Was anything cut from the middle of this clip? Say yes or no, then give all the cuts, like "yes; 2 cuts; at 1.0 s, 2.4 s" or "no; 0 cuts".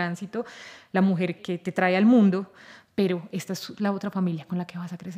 yes; 1 cut; at 1.4 s